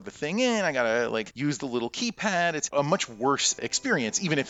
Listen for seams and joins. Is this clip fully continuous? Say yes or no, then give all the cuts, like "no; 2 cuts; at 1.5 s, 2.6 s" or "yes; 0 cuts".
yes; 0 cuts